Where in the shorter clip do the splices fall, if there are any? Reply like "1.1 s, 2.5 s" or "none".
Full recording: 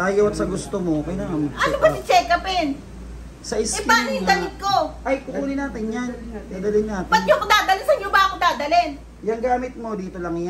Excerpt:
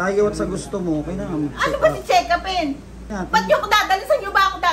3.2 s